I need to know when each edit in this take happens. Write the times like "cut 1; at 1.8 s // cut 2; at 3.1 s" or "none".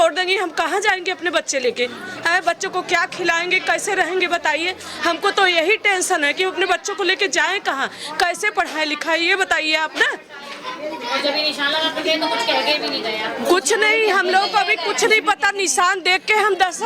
none